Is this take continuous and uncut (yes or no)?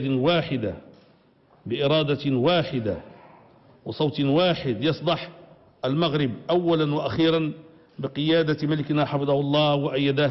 no